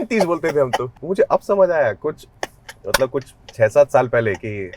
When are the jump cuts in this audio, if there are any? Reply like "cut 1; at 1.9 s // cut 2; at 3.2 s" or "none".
cut 1; at 0.9 s

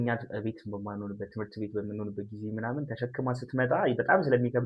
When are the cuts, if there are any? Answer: none

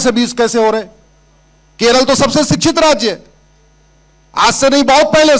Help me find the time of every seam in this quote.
none

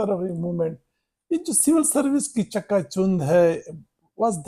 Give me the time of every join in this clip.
none

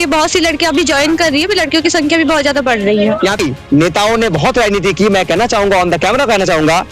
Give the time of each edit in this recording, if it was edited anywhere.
cut 1; at 3.4 s

